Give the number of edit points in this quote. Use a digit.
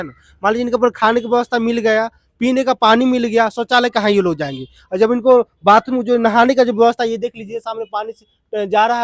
0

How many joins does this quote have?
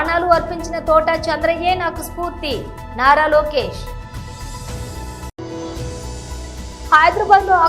2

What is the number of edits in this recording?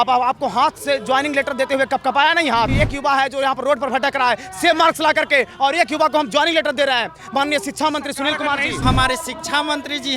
2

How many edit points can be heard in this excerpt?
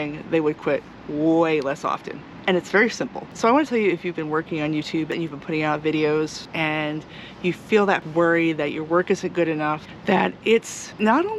5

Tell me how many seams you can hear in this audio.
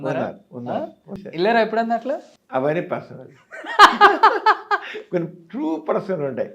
2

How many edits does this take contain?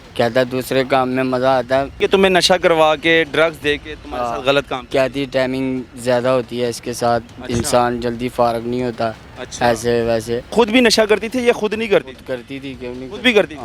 2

